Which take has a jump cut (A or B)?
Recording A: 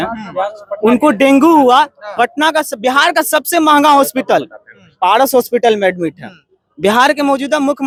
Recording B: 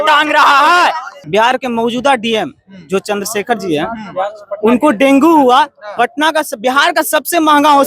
B